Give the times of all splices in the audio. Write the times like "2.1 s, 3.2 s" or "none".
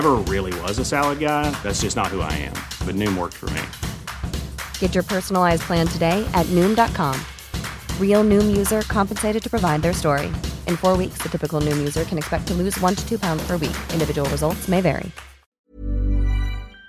15.7 s

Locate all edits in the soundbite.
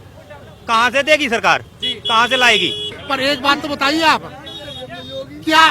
2.9 s

